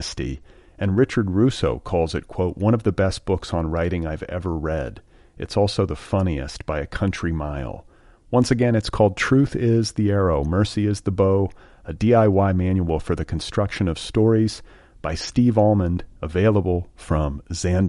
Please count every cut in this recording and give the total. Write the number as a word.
zero